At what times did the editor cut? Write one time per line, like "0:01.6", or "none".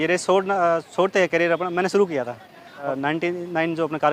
0:02.9

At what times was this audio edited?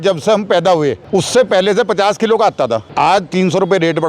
0:01.0
0:02.9

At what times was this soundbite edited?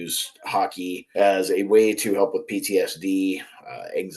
0:01.0

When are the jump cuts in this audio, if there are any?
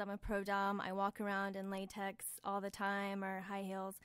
none

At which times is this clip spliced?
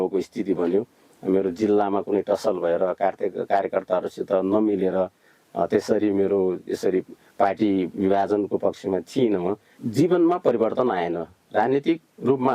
0:09.7

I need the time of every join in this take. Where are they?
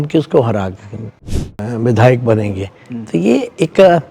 0:01.3

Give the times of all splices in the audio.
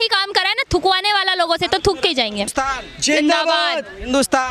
0:02.4

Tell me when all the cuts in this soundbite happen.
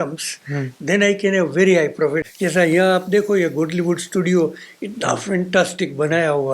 0:02.2

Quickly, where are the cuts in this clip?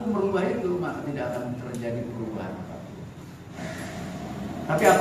0:03.5

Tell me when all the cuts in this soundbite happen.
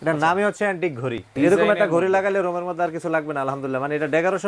0:01.3

